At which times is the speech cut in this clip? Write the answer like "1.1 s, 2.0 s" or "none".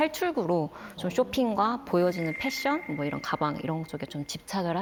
none